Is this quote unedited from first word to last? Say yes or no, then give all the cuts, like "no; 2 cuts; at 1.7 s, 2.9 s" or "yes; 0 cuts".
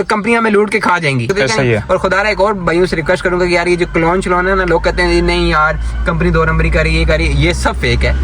no; 1 cut; at 1.3 s